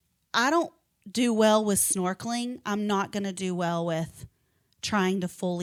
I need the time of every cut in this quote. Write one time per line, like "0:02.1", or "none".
none